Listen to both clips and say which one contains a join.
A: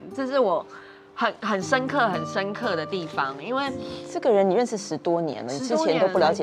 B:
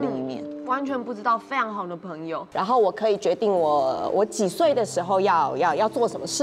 B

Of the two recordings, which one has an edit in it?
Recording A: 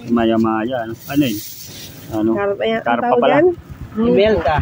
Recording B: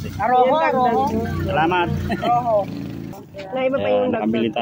B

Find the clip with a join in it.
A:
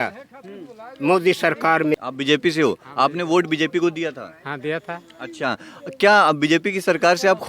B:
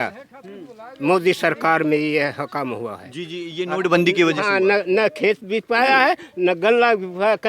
A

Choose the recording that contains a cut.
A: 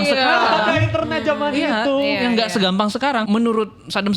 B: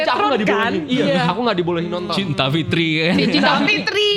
A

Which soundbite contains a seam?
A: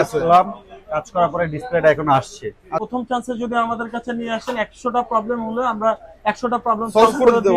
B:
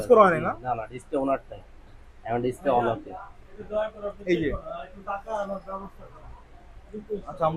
A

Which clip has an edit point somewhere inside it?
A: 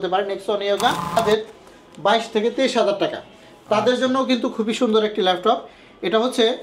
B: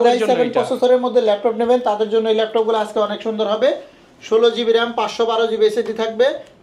A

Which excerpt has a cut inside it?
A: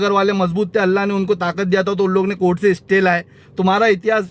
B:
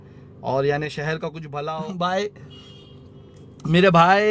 B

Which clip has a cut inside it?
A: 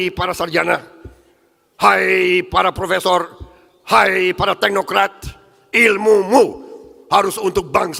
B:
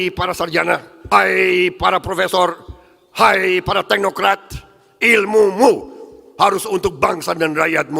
B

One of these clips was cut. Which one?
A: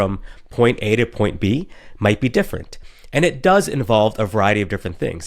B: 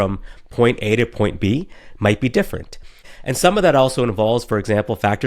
B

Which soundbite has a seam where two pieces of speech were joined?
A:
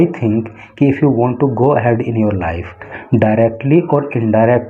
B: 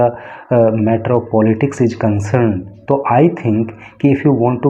A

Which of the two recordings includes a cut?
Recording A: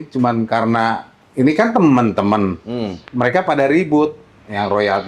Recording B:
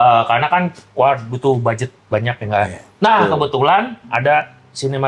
A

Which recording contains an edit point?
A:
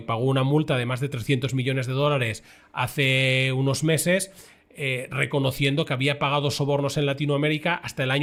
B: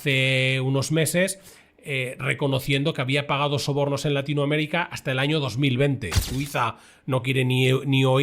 B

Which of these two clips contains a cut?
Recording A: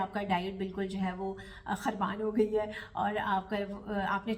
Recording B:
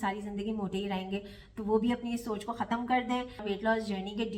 B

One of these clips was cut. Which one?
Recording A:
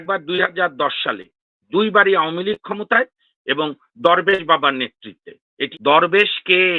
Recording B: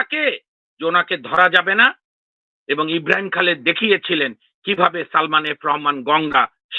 A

